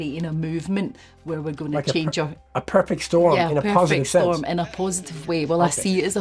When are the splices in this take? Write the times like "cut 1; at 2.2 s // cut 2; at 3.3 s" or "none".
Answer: none